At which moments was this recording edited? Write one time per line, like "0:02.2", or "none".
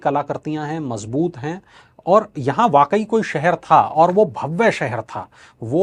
none